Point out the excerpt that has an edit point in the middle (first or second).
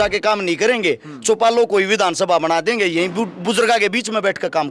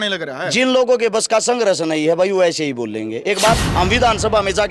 second